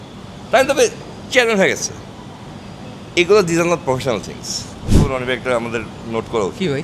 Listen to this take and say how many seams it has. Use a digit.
1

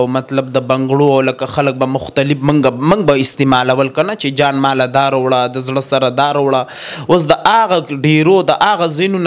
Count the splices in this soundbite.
0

